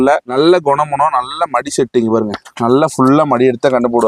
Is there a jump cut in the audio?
no; 0 cuts

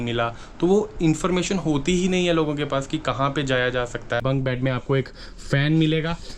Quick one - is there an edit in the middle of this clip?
yes; 1 cut; at 4.2 s

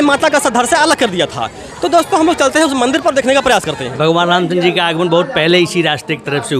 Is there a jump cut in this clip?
yes; 1 cut; at 3.9 s

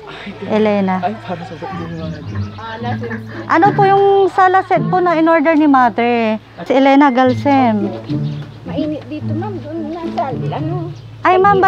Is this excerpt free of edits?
no; 1 cut; at 6.7 s

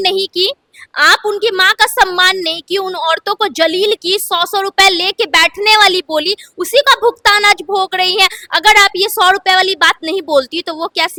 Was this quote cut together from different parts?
no; 0 cuts

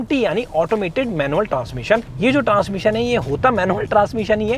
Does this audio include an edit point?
yes; 1 cut; at 2.1 s

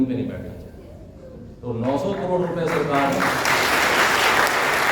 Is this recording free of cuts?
yes; 0 cuts

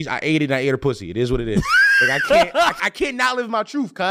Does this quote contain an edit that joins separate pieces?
yes; 1 cut; at 2.8 s

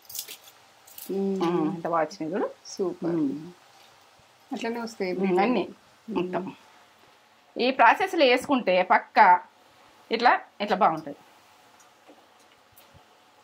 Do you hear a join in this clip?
no; 0 cuts

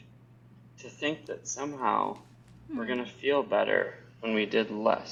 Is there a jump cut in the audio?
no; 0 cuts

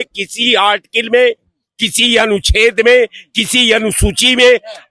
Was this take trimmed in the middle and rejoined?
no; 0 cuts

